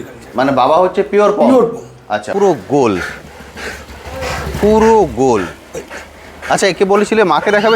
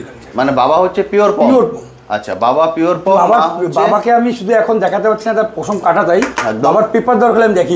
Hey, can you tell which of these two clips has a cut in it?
first; 1 cut; at 2.3 s

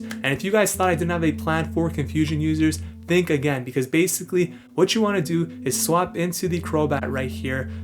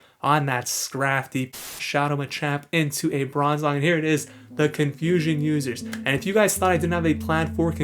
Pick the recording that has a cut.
second; 1 cut; at 1.6 s

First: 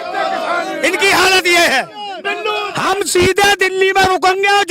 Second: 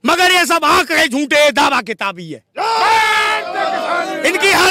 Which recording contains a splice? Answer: first; 1 cut; at 2.7 s

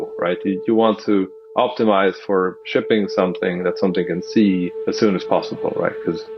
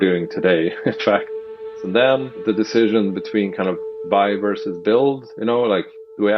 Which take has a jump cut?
second; 2 cuts; at 1.4 s, 2.4 s

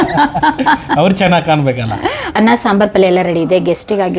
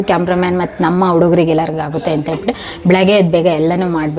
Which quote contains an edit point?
first; 1 cut; at 2.2 s

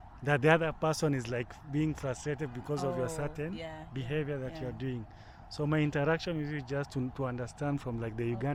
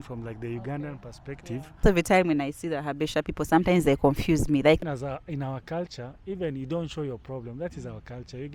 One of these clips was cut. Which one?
second; 2 cuts; at 1.8 s, 4.8 s

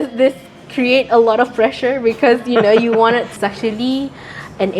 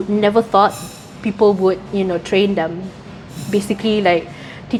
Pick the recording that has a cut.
first; 1 cut; at 3.4 s

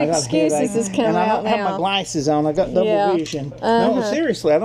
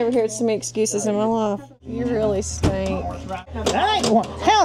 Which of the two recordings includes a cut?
second; 2 cuts; at 1.9 s, 3.5 s

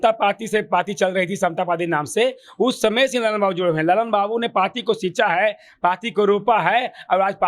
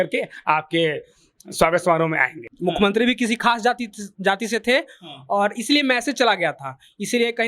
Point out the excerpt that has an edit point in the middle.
second; 1 cut; at 2.5 s

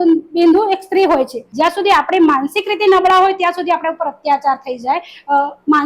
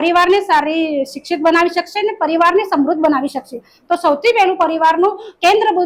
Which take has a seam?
first; 1 cut; at 1.4 s

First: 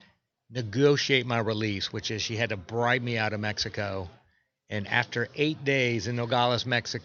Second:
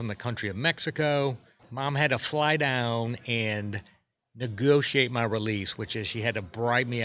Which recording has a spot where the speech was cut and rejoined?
second; 1 cut; at 1.6 s

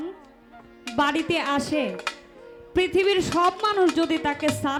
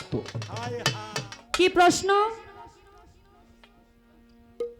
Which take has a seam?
second; 1 cut; at 1.0 s

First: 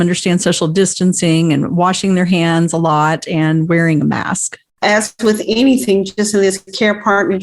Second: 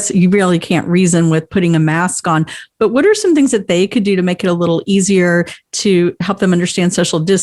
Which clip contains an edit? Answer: first; 1 cut; at 4.8 s

